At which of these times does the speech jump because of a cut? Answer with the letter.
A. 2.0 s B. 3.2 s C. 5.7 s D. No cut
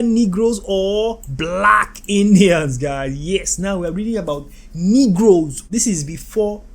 C